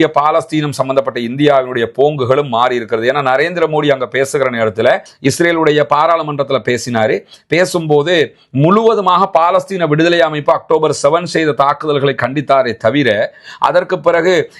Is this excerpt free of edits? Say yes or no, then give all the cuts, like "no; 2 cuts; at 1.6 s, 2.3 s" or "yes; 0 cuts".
yes; 0 cuts